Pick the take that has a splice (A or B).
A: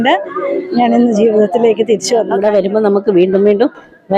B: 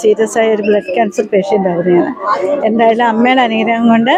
A